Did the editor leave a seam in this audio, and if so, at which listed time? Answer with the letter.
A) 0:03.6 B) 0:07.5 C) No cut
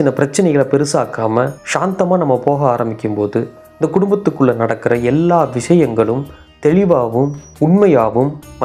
C